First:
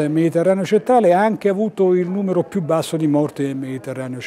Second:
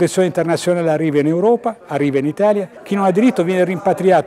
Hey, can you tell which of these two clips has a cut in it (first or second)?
second